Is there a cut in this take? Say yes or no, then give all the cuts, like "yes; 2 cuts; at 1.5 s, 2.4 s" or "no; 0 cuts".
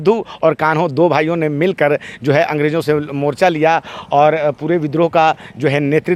no; 0 cuts